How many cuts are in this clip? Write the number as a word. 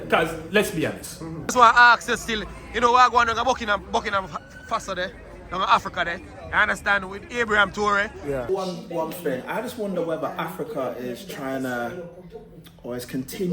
two